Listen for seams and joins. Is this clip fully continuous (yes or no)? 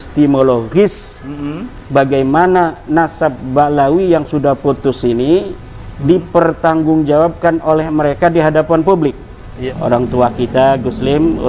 no